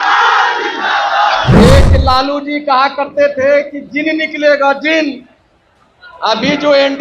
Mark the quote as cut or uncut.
cut